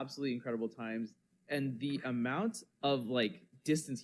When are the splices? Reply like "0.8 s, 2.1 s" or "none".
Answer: 2.7 s